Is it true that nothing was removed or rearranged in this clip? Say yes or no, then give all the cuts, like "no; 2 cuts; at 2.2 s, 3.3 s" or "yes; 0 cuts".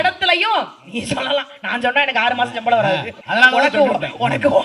no; 1 cut; at 3.2 s